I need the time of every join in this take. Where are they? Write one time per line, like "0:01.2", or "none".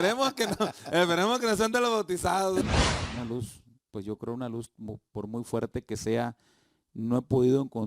0:02.6